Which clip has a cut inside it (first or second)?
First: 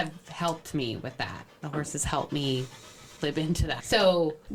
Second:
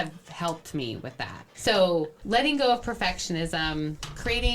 second